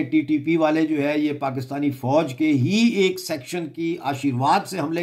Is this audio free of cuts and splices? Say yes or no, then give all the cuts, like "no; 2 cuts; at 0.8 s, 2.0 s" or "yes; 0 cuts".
yes; 0 cuts